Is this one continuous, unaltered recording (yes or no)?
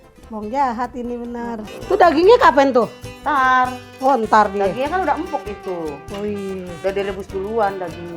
no